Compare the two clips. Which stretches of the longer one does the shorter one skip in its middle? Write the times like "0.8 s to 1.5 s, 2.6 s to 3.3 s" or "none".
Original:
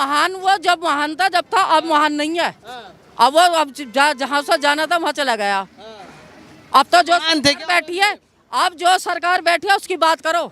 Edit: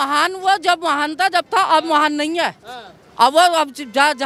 none